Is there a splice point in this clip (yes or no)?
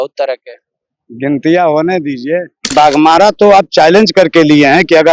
yes